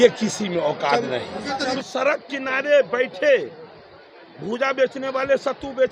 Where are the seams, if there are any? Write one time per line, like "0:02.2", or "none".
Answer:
0:01.8